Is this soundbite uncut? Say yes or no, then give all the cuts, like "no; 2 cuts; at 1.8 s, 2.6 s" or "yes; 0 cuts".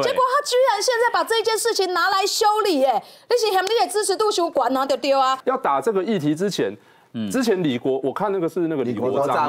no; 1 cut; at 5.4 s